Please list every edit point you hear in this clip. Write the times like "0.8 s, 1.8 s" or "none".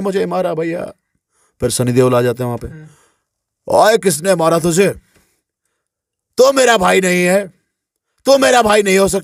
none